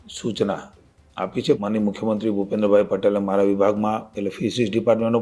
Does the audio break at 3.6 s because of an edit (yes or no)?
no